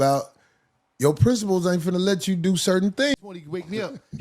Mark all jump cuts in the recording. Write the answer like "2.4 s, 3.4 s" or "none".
3.1 s